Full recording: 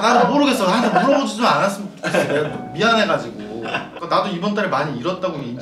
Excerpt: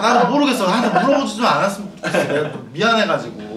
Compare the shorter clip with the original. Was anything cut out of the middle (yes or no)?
no